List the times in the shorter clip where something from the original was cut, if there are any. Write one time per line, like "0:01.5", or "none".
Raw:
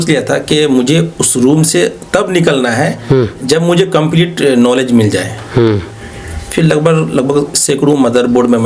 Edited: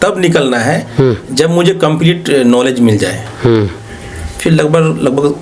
none